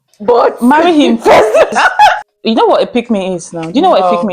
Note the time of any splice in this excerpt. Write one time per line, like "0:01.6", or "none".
0:02.2